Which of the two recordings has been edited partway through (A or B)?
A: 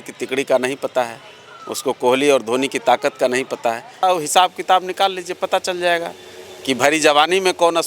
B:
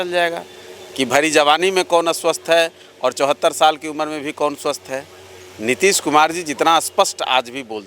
A